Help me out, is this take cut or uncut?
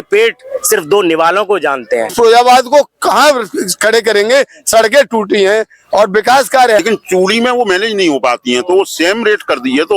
cut